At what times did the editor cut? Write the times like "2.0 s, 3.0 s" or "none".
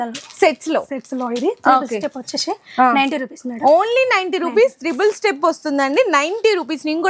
none